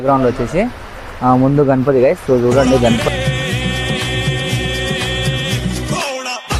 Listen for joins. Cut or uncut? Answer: uncut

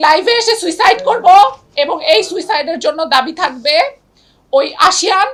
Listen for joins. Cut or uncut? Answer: uncut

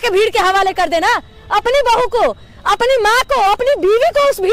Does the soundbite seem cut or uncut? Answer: uncut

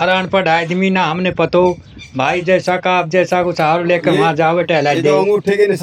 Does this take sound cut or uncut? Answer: uncut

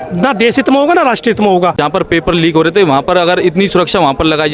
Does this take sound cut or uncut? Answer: cut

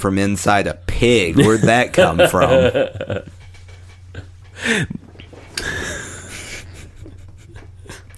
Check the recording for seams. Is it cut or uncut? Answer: uncut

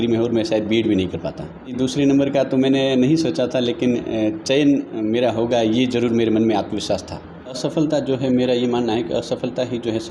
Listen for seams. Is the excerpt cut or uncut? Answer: cut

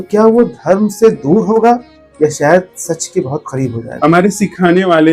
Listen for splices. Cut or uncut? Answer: cut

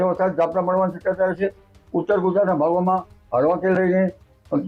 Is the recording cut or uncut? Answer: uncut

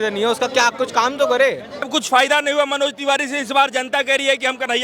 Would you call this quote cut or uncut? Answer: cut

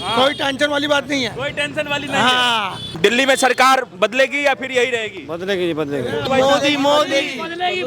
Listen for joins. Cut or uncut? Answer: cut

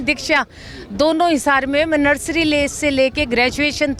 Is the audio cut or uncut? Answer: uncut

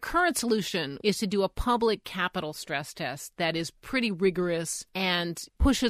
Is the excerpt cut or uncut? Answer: cut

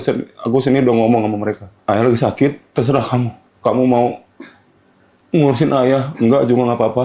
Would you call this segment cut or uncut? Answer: cut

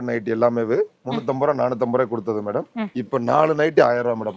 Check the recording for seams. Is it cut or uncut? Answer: uncut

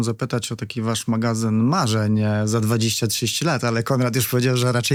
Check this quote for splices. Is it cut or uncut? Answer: uncut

